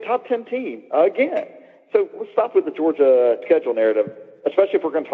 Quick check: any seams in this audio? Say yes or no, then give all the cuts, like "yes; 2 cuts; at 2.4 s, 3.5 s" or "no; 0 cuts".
yes; 1 cut; at 3.4 s